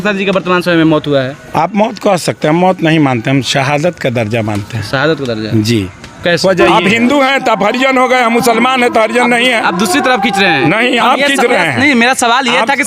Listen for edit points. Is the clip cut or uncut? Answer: cut